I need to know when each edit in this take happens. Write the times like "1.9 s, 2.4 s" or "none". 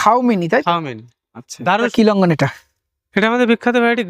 1.9 s